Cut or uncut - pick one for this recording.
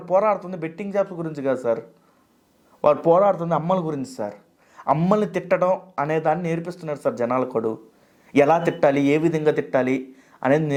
uncut